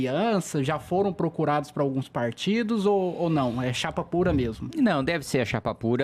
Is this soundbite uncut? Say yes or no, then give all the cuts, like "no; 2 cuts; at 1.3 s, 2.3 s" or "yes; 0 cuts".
yes; 0 cuts